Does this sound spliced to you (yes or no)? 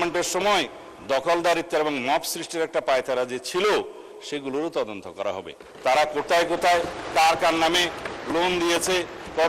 no